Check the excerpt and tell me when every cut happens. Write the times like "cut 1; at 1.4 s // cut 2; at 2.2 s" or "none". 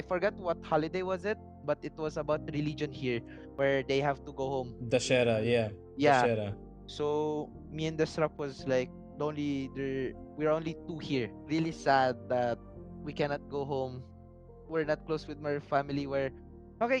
cut 1; at 11.4 s

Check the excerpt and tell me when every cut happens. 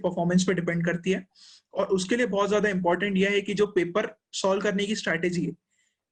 none

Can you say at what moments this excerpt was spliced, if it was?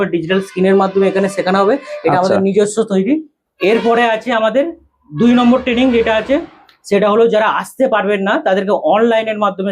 cut 1; at 3.4 s

